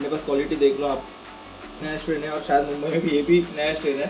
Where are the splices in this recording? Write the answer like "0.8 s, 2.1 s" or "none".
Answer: 1.8 s